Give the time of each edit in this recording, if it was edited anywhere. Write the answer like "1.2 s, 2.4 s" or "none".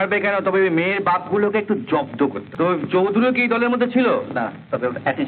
2.4 s

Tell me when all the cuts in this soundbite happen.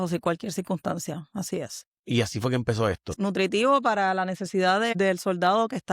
3.1 s, 4.9 s

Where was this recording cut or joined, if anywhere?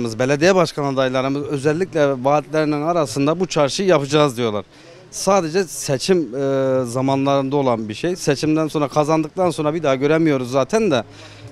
none

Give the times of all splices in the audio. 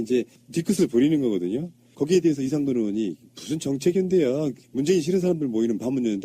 4.6 s

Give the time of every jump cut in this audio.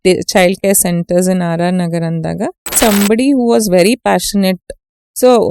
2.7 s

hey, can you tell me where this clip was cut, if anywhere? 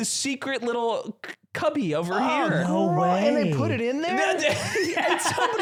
none

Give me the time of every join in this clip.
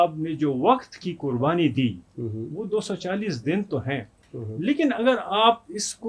none

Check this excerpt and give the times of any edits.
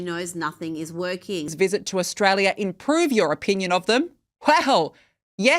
1.5 s

